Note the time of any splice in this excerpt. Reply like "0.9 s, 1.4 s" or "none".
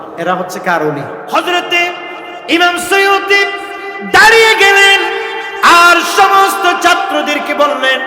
1.2 s